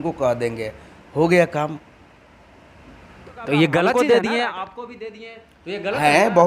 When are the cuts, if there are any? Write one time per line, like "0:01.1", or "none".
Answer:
0:03.9